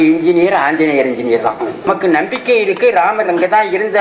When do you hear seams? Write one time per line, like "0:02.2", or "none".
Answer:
0:01.9